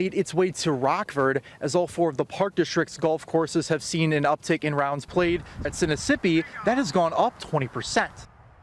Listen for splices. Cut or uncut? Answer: uncut